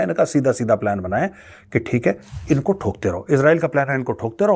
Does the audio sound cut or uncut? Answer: uncut